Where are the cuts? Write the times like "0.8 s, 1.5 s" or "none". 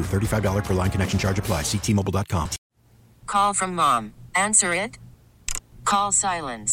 2.7 s